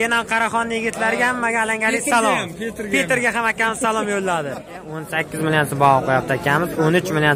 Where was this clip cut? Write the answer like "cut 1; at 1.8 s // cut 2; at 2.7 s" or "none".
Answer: cut 1; at 5.1 s